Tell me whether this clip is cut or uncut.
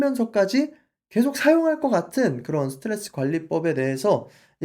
uncut